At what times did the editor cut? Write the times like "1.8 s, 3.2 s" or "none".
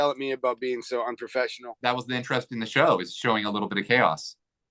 1.8 s